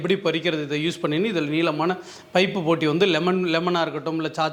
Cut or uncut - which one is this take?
uncut